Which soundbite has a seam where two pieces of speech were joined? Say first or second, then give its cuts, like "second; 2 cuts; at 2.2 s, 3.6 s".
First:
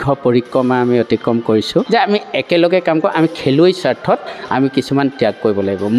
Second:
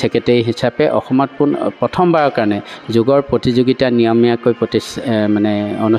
first; 1 cut; at 1.9 s